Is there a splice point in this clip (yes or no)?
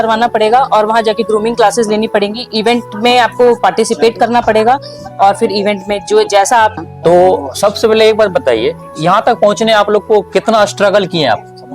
yes